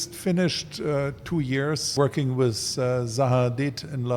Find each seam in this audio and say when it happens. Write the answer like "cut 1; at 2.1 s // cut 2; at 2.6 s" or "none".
cut 1; at 1.9 s